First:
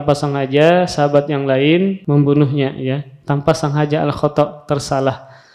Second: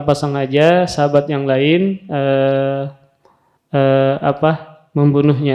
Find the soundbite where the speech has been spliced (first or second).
first